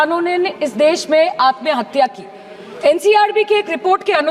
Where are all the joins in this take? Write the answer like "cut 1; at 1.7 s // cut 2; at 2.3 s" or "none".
none